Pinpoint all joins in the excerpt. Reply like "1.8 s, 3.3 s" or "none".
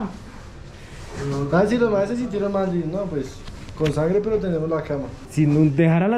5.2 s